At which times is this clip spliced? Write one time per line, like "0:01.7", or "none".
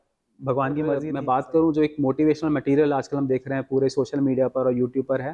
0:01.1

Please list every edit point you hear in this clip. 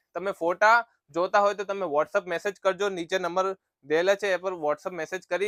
none

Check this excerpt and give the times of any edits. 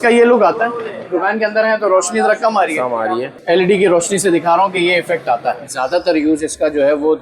0:01.1
0:03.3
0:05.7

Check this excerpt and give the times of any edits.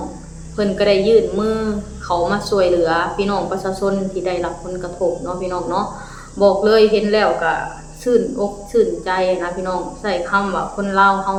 none

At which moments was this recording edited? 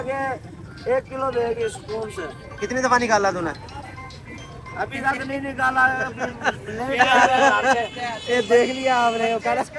none

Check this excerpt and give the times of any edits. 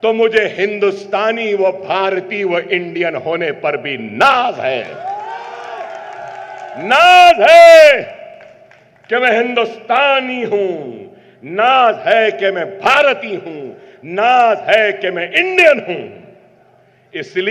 none

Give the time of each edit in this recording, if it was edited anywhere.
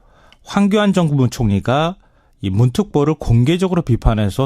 0:01.4

